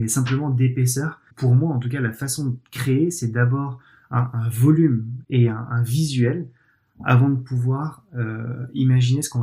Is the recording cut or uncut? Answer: cut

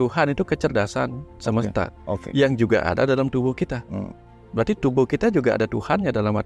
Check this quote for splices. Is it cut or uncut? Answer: uncut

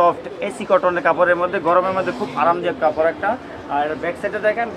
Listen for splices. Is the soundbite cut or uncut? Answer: uncut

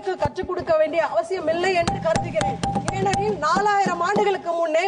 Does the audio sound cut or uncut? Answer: uncut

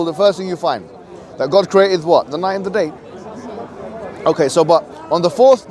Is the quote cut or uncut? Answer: uncut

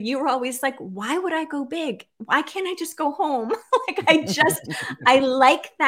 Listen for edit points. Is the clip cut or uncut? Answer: uncut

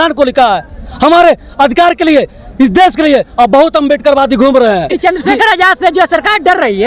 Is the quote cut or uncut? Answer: cut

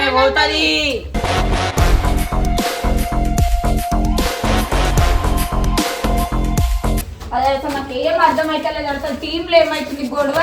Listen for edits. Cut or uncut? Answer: cut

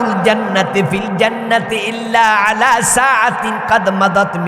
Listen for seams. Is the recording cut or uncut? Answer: uncut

